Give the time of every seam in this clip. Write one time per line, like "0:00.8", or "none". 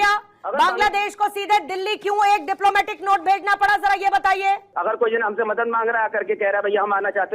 0:04.7

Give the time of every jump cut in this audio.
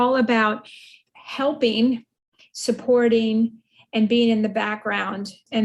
none

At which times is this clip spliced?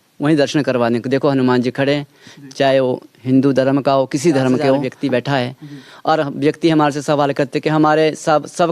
0:04.9

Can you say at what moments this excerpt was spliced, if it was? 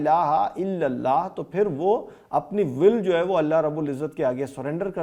none

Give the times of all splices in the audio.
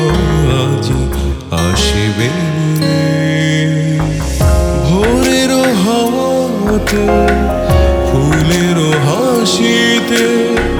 none

